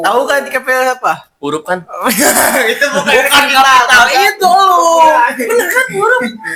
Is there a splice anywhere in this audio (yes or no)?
no